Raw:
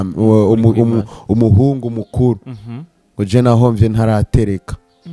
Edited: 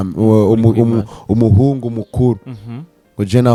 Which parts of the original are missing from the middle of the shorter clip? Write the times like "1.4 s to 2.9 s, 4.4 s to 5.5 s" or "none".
none